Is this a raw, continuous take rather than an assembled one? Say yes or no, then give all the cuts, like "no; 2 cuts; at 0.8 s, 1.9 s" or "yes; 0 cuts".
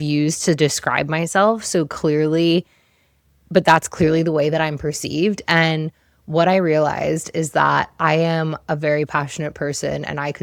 yes; 0 cuts